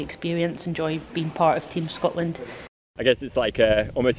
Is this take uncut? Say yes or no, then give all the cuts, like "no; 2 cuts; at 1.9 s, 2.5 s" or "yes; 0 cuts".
no; 1 cut; at 2.8 s